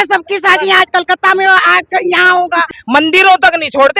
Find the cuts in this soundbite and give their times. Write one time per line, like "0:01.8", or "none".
0:02.7